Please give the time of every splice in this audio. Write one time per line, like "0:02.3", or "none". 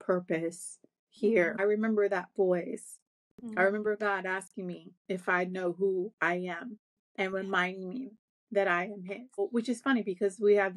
0:01.6
0:09.4